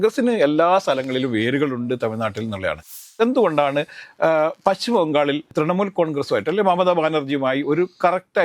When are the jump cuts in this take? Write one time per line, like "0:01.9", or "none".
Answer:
0:03.0
0:05.5